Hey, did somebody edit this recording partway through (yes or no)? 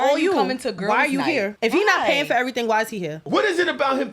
yes